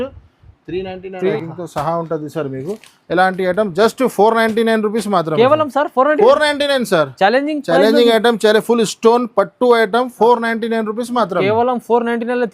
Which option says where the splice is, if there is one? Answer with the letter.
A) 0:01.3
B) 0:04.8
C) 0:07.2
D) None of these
A